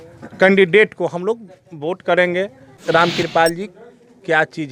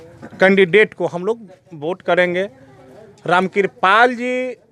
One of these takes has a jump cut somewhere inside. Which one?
first; 1 cut; at 2.8 s

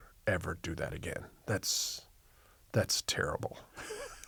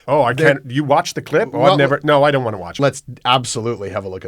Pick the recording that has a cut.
second; 1 cut; at 2.7 s

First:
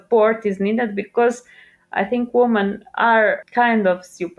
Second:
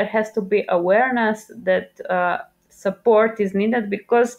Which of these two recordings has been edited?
first; 1 cut; at 3.4 s

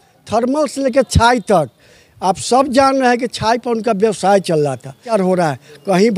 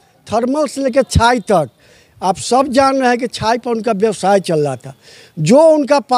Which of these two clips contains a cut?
first; 1 cut; at 5.1 s

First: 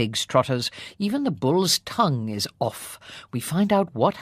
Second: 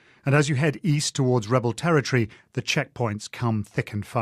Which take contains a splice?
second; 1 cut; at 1.5 s

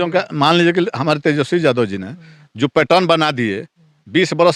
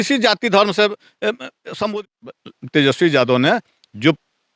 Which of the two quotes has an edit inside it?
second; 1 cut; at 2.1 s

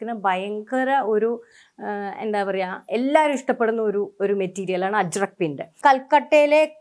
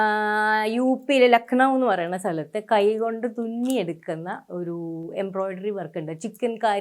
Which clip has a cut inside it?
first; 1 cut; at 5.7 s

